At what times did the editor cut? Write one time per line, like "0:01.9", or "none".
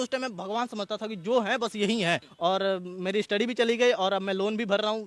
0:02.3